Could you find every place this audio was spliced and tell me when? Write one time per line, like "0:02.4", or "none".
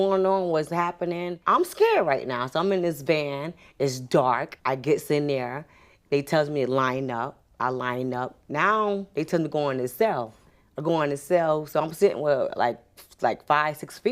0:01.3
0:04.5